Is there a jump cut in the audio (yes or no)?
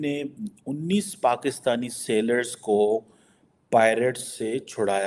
no